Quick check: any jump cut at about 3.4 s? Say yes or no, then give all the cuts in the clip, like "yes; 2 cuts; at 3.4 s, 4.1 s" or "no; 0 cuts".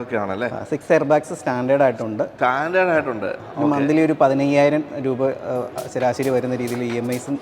yes; 1 cut; at 3.4 s